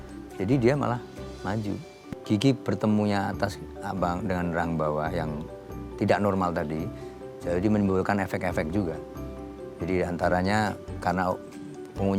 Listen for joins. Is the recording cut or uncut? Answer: cut